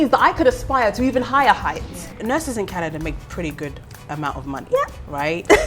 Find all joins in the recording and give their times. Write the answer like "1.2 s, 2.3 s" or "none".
2.2 s